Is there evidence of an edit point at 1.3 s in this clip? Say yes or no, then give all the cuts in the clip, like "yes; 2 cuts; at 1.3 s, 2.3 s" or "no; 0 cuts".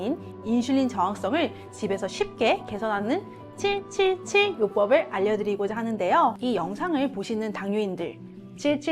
no; 1 cut; at 6.4 s